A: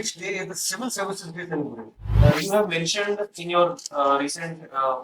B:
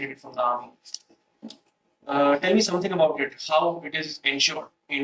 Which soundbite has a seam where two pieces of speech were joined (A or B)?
A